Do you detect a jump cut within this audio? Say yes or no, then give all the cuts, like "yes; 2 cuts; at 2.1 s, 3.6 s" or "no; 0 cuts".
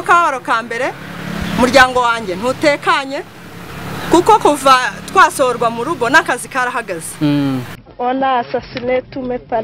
yes; 1 cut; at 7.9 s